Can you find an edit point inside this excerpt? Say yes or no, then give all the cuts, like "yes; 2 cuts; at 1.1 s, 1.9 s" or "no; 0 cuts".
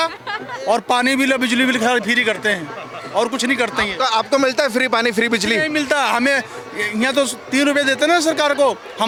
no; 0 cuts